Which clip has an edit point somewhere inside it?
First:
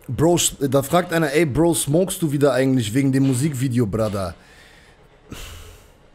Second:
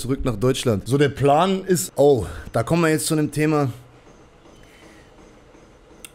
second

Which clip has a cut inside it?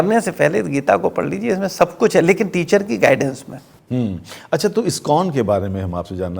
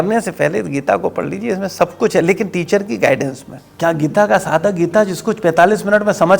second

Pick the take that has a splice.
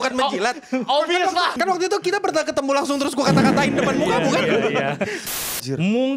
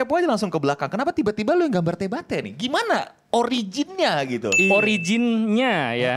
first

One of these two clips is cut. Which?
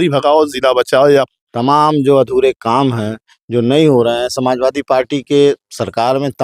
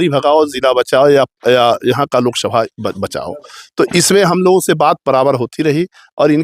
first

